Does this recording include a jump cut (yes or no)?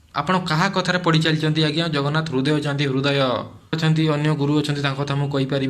yes